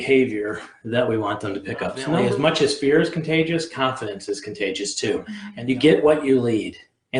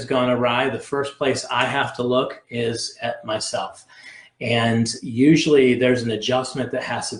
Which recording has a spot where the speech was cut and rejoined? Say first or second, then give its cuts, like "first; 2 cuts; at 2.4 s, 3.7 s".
first; 2 cuts; at 2.0 s, 5.4 s